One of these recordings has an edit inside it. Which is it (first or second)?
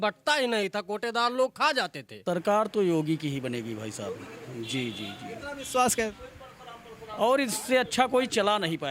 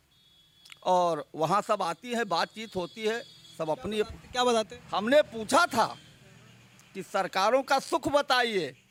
first